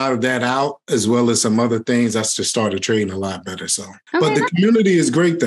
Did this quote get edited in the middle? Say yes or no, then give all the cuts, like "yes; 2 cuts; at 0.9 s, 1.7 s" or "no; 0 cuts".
no; 0 cuts